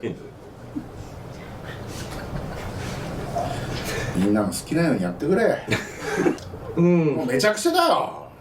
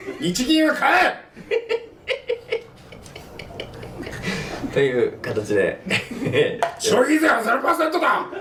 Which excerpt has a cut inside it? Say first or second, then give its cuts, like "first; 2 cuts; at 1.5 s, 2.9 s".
first; 1 cut; at 6.3 s